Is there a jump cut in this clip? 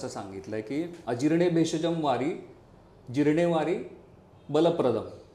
yes; 1 cut; at 1.0 s

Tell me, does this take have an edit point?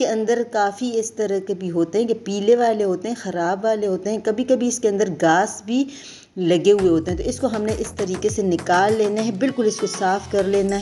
no; 0 cuts

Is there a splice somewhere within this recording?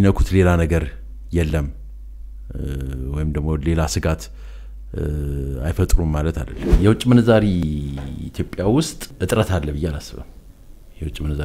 yes; 2 cuts; at 6.7 s, 9.1 s

